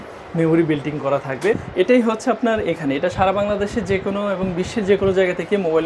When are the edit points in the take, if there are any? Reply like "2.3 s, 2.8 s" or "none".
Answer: 1.6 s